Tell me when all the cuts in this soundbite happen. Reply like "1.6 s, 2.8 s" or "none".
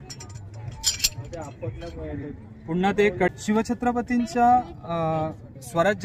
3.3 s